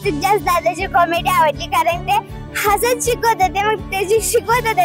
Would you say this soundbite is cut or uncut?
uncut